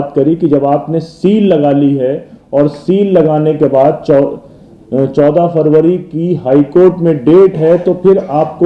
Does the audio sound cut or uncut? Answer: uncut